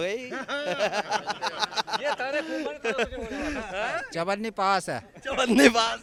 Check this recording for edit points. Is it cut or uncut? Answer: uncut